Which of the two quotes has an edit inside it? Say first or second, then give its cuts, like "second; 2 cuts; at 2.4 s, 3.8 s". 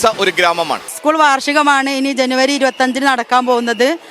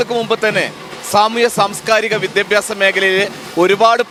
first; 1 cut; at 0.9 s